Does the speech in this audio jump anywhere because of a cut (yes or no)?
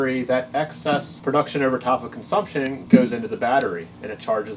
yes